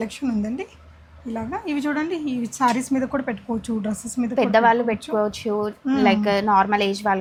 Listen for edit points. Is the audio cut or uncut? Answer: uncut